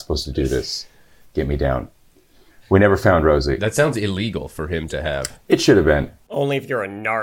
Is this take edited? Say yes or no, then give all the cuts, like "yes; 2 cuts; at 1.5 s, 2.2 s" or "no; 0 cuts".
yes; 1 cut; at 6.1 s